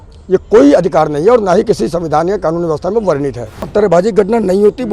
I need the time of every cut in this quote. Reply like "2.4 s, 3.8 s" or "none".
3.7 s